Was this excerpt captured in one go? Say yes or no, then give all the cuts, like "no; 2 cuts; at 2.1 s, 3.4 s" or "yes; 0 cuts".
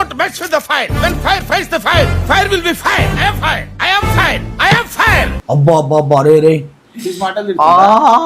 no; 1 cut; at 5.4 s